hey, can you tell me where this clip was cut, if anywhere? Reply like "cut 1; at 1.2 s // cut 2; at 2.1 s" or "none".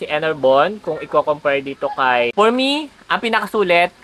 cut 1; at 2.3 s

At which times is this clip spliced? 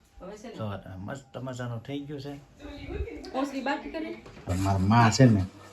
cut 1; at 4.5 s

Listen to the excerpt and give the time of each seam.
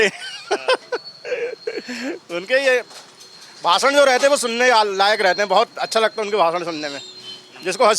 none

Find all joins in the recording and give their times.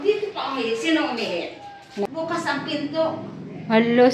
cut 1; at 2.1 s

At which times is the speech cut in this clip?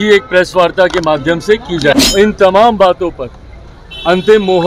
cut 1; at 2.0 s

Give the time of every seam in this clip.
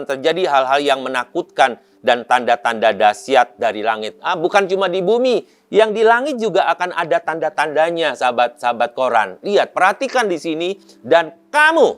cut 1; at 10.9 s

